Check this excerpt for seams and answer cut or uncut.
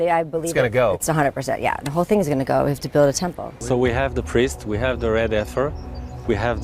cut